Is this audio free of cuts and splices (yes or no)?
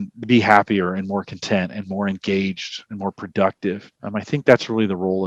no